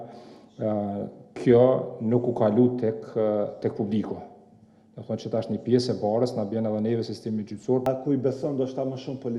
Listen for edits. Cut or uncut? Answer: cut